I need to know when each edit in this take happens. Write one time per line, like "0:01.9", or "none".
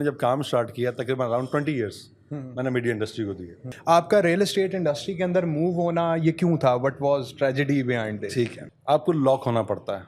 0:03.7
0:08.6

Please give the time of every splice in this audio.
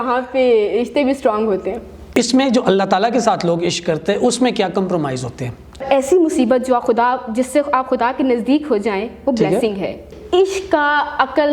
0:02.1
0:05.8
0:10.0

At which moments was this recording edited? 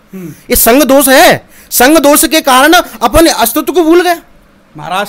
none

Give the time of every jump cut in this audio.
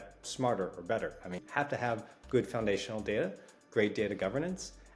0:01.4

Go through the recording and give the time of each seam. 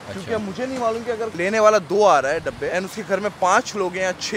0:01.3
0:02.7

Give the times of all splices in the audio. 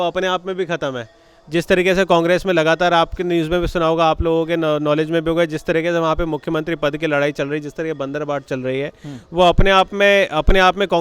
none

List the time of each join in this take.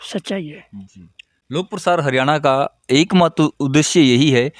none

